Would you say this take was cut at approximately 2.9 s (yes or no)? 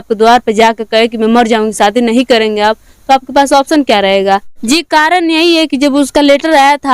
no